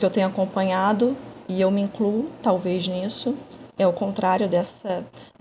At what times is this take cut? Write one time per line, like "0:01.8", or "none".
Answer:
0:01.3

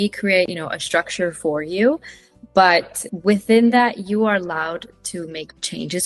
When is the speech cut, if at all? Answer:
none

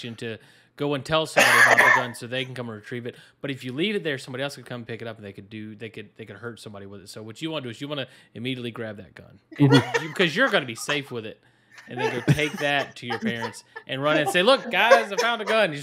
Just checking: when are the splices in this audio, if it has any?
0:09.4

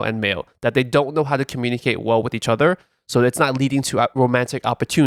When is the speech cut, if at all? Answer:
none

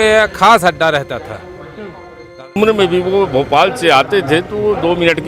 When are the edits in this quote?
0:02.5

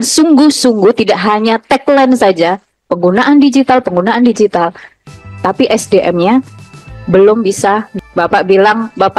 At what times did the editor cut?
0:07.9

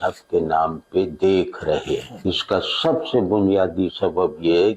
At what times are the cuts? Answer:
0:02.1

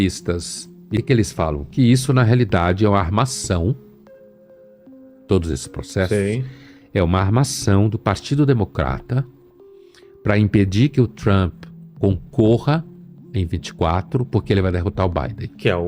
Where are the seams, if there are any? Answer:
0:01.0

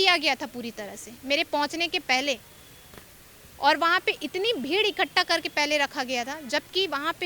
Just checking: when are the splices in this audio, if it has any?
none

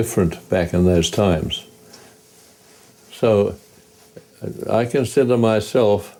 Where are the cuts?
none

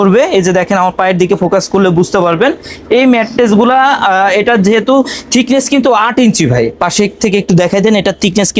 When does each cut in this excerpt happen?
none

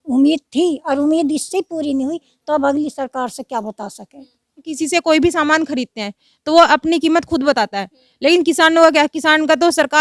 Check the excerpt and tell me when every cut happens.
0:04.7

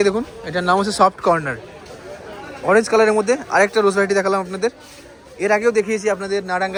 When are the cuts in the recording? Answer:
none

